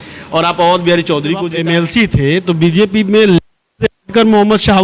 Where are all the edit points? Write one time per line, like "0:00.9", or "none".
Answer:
0:01.5